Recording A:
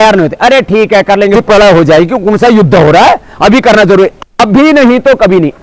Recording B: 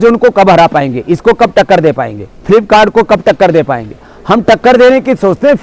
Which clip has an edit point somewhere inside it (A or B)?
A